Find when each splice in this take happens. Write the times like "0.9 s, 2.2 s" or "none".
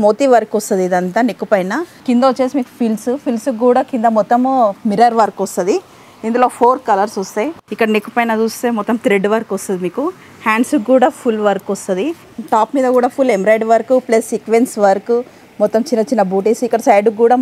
1.9 s, 7.6 s, 12.3 s